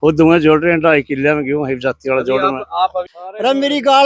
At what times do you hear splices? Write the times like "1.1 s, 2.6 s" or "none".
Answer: 3.1 s